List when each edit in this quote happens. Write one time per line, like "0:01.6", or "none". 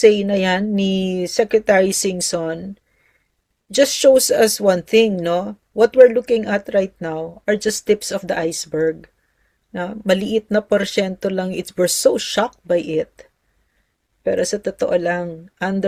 none